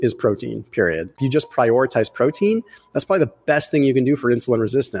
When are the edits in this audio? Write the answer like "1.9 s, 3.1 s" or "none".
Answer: 1.2 s